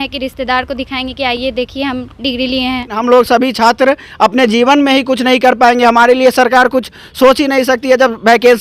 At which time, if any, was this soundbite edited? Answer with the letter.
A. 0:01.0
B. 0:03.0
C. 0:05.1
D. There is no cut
B